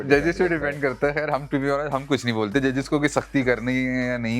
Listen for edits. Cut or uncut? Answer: uncut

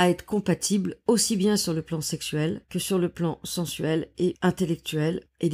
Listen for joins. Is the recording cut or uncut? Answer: cut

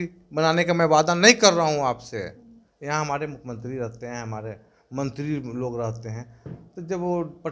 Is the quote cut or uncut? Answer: uncut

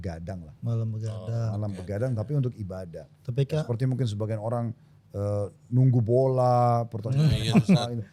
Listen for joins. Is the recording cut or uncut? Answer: uncut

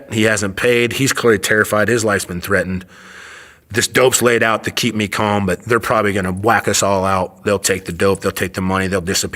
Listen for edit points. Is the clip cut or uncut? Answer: uncut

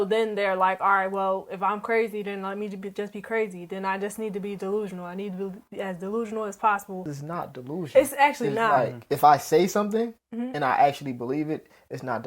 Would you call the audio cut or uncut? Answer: cut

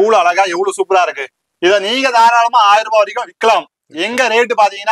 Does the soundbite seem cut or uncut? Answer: uncut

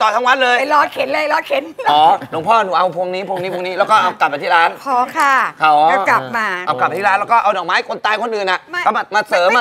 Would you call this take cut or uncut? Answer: uncut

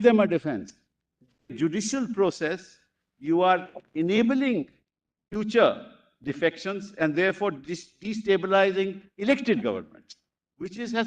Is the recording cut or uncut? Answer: cut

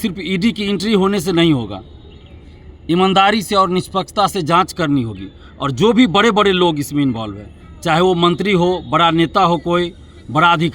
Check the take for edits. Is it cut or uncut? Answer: uncut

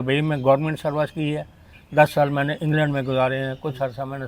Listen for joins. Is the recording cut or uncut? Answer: uncut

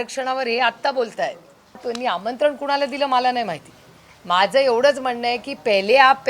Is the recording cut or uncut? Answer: cut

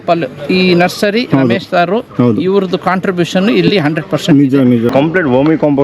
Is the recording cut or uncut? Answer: cut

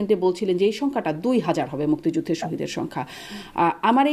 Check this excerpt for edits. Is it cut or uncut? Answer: uncut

